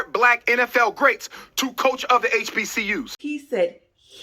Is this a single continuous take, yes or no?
no